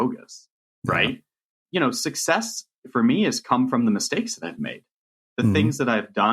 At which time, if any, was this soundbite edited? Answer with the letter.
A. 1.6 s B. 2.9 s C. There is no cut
A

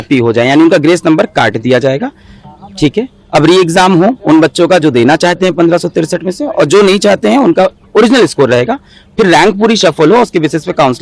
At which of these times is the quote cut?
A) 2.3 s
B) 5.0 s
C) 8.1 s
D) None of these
D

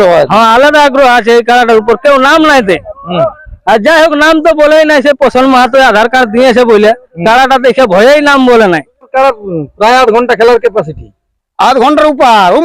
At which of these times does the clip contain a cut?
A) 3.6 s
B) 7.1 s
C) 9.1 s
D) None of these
C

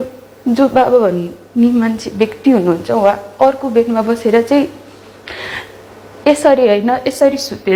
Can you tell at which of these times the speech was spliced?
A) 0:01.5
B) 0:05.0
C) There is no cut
C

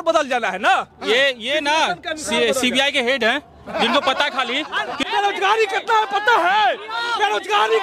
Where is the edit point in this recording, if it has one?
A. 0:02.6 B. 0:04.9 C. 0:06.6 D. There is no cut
B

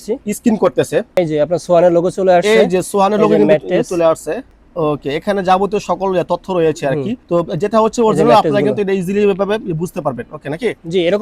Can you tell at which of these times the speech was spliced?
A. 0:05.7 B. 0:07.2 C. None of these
B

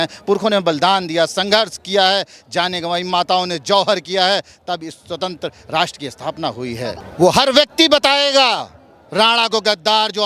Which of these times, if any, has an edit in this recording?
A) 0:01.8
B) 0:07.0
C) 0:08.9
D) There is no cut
B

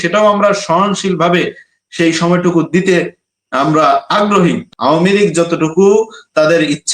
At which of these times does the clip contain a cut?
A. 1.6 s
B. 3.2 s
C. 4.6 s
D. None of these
C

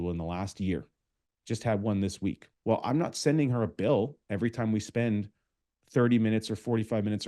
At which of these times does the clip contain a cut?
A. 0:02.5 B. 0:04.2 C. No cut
A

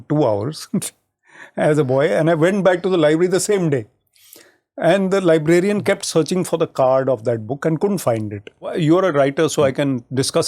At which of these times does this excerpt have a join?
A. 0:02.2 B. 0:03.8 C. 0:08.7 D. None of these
C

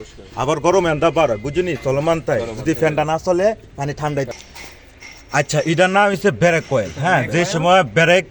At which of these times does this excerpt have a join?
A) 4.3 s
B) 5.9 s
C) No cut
A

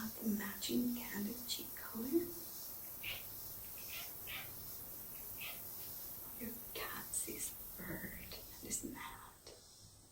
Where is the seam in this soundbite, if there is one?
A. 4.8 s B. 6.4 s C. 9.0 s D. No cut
D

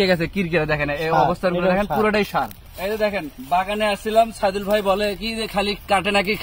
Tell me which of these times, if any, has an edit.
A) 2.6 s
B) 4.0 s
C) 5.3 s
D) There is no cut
A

